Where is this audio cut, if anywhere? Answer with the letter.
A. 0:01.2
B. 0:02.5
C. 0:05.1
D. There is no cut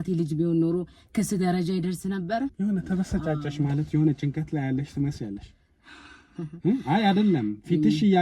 B